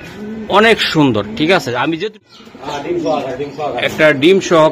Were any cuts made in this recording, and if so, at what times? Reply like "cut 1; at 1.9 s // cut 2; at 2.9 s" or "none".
cut 1; at 2.2 s